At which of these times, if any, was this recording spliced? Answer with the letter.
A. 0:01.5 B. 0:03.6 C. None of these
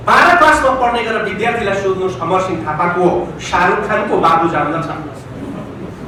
C